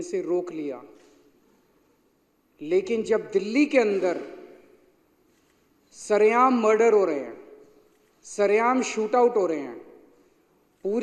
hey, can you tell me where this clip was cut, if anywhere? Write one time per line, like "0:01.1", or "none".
none